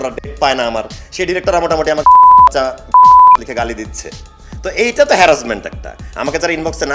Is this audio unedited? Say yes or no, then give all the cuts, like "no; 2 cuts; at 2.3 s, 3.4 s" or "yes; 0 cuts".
yes; 0 cuts